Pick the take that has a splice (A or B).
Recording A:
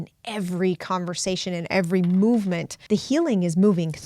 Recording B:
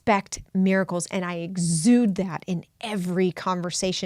A